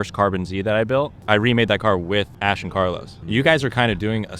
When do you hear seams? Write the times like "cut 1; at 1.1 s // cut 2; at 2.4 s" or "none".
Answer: cut 1; at 1.2 s // cut 2; at 2.8 s